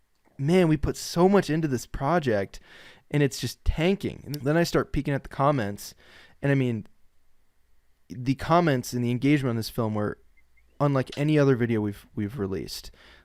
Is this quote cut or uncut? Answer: cut